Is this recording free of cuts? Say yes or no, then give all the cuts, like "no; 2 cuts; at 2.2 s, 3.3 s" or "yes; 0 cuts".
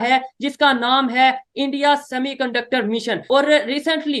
no; 1 cut; at 3.2 s